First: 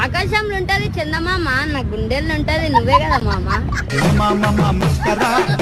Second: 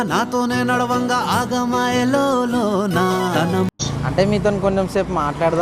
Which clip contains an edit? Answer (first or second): second